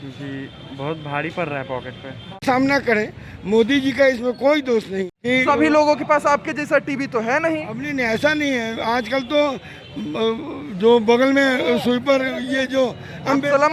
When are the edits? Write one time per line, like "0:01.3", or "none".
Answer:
0:02.4
0:05.1